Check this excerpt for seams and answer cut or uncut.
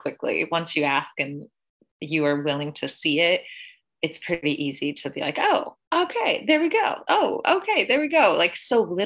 cut